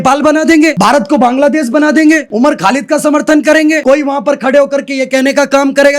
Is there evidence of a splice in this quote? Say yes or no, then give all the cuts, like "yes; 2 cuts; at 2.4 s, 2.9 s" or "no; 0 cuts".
yes; 3 cuts; at 0.8 s, 2.3 s, 3.8 s